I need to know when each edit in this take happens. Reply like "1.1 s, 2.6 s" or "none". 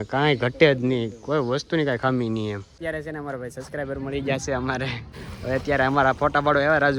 2.6 s, 5.1 s